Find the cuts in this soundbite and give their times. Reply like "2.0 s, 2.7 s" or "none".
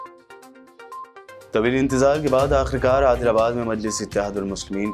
none